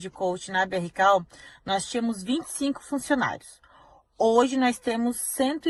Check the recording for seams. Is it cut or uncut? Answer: uncut